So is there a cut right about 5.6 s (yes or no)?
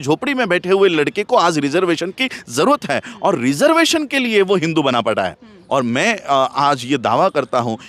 yes